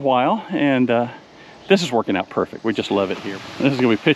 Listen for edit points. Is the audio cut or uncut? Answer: cut